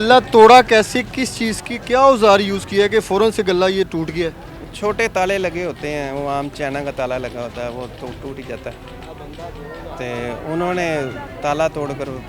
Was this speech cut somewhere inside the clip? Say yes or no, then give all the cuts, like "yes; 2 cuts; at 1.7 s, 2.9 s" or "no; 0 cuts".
no; 0 cuts